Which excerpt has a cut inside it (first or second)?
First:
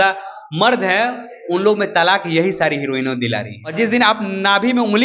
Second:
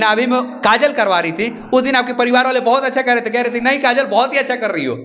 first